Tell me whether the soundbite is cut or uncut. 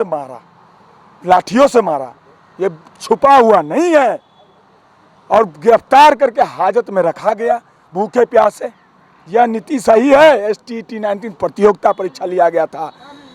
uncut